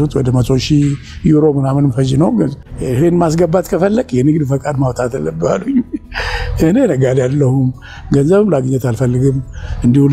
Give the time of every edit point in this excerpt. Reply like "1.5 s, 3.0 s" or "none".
2.6 s